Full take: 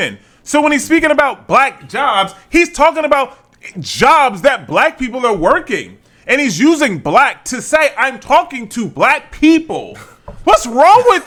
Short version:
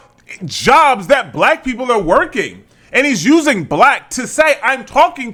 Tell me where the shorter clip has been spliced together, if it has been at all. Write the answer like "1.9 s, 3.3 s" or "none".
none